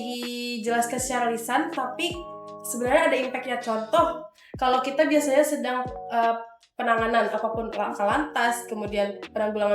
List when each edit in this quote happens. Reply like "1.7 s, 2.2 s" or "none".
none